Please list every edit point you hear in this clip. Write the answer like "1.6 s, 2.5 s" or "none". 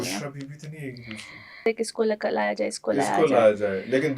1.6 s